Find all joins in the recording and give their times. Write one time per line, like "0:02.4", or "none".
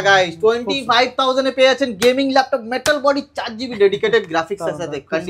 none